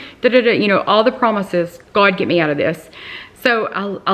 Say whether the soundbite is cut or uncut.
uncut